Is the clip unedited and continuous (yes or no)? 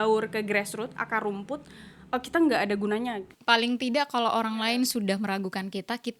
no